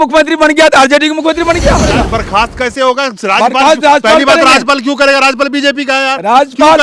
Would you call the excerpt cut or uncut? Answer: cut